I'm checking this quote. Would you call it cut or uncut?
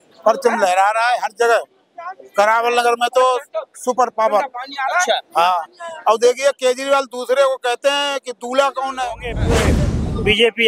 cut